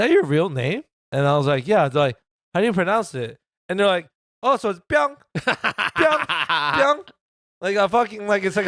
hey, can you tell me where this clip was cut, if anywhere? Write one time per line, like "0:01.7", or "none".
none